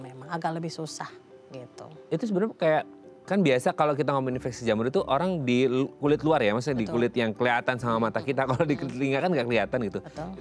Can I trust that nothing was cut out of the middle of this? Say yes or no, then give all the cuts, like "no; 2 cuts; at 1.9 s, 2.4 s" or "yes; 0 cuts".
yes; 0 cuts